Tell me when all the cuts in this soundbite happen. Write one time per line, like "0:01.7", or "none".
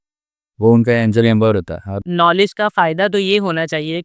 0:01.9